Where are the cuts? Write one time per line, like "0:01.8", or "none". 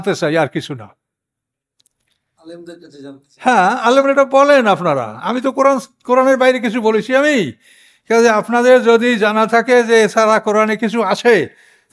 none